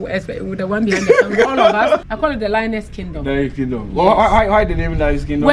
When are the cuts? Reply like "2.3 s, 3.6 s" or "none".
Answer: 2.0 s